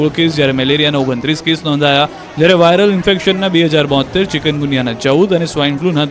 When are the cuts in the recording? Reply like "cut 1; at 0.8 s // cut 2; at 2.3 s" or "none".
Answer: cut 1; at 4.3 s